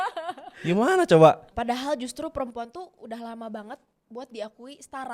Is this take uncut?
no; 2 cuts; at 1.5 s, 3.9 s

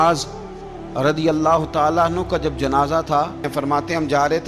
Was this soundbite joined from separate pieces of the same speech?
yes; 1 cut; at 3.5 s

